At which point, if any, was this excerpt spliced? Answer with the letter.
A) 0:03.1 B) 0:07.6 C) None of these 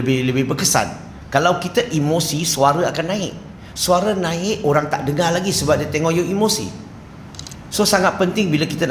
C